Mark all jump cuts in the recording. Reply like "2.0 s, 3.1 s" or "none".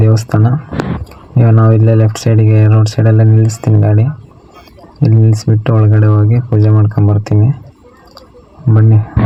none